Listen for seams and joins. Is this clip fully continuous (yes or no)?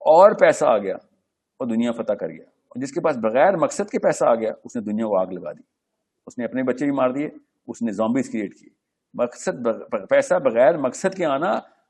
yes